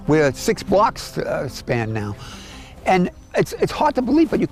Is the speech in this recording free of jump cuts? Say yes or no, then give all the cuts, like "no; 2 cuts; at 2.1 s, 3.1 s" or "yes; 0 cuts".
yes; 0 cuts